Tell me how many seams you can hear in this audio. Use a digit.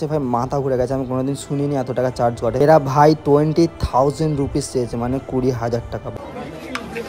1